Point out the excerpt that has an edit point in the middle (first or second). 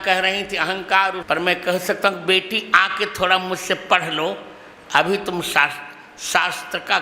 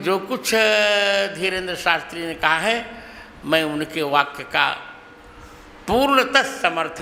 first